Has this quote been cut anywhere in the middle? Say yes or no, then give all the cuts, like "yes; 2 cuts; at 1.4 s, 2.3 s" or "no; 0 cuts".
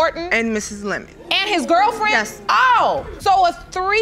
yes; 1 cut; at 2.4 s